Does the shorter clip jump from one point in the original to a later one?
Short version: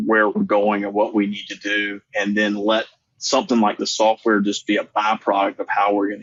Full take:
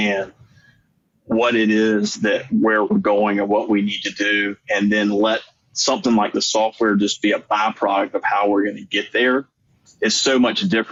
no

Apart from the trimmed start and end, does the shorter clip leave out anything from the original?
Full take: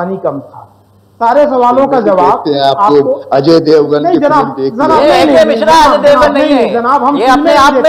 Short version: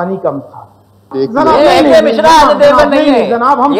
yes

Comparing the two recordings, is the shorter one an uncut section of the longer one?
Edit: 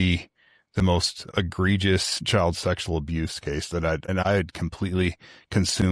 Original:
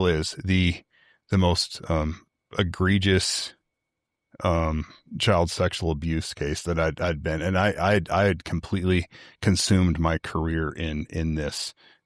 no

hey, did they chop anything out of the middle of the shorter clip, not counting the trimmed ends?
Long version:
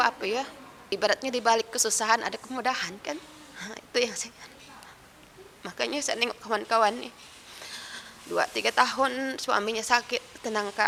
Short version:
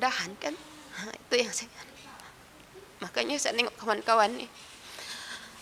no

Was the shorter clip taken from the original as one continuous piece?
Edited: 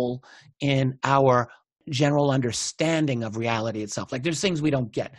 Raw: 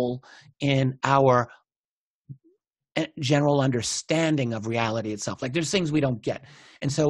no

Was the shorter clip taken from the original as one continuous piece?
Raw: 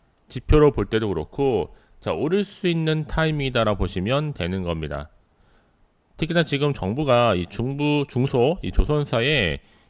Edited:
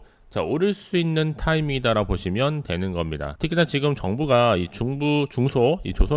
no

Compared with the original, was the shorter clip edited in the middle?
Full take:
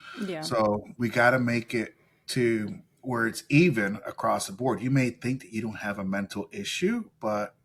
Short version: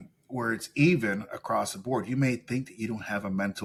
no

